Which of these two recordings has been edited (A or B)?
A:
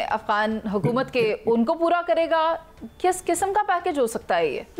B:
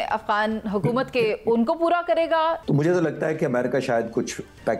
B